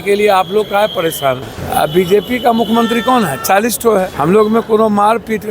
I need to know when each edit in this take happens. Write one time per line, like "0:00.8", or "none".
0:01.5
0:04.1